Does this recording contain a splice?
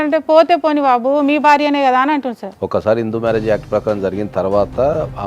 yes; 1 cut; at 2.5 s

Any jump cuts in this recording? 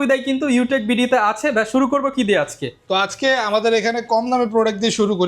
no; 0 cuts

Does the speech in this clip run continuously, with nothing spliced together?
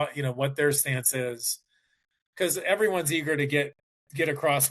yes; 0 cuts

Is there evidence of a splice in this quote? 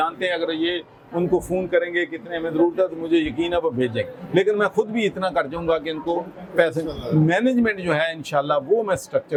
no; 0 cuts

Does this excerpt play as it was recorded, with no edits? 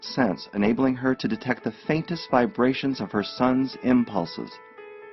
no; 1 cut; at 3.3 s

